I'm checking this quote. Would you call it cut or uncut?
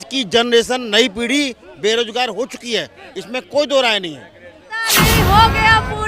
cut